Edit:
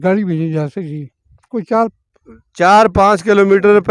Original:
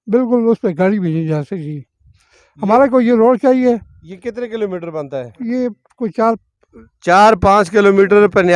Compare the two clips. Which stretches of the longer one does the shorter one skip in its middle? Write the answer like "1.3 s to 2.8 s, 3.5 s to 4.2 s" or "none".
2.1 s to 5.8 s